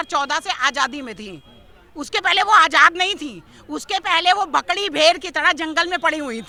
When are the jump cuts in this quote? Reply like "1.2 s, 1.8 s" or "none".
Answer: none